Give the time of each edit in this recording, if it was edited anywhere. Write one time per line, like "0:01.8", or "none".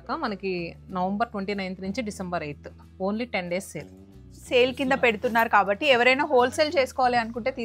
0:04.3